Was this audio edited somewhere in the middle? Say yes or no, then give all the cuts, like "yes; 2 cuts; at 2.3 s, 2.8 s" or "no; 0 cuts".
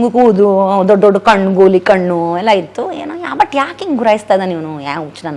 no; 0 cuts